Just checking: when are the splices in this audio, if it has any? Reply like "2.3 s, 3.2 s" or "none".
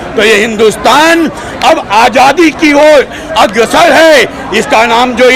none